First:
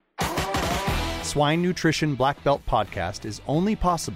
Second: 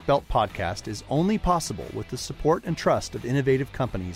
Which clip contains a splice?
first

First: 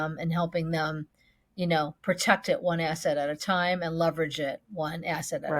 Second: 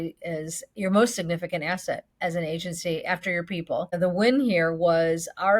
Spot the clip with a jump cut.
second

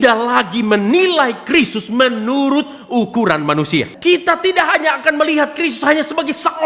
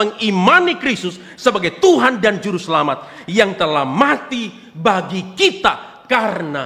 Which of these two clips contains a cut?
first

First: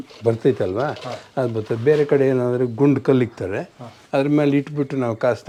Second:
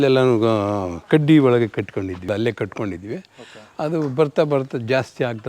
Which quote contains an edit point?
second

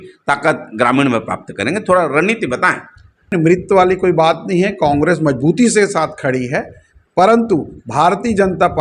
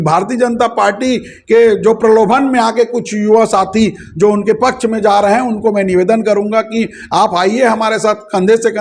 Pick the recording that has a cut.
first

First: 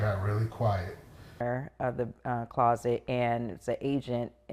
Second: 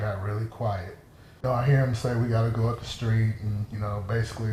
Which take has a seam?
first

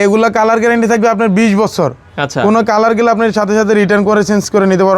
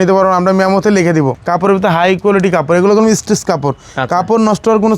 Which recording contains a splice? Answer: second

